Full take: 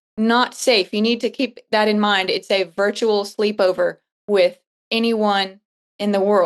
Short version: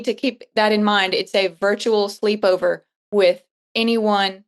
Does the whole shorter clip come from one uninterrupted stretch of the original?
yes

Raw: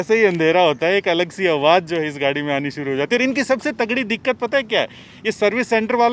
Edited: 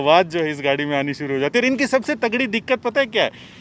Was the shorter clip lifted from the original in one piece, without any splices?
yes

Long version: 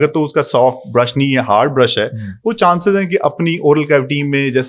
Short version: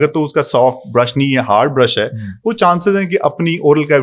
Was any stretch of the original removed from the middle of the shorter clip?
no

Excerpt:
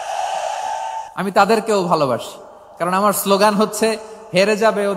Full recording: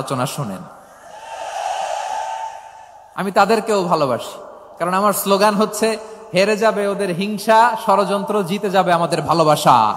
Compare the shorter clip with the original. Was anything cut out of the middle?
yes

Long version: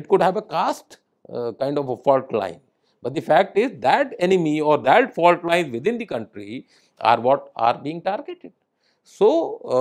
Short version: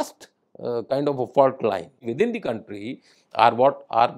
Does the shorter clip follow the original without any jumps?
no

